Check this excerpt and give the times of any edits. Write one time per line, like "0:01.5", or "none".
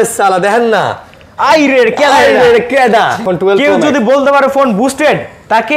0:03.3